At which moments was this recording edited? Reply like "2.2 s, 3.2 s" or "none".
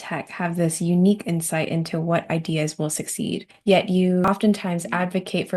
3.5 s, 4.3 s